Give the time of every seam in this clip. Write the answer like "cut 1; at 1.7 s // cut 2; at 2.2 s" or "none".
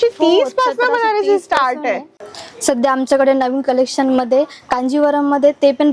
none